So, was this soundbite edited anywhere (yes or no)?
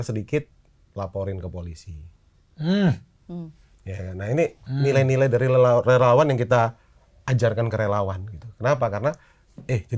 no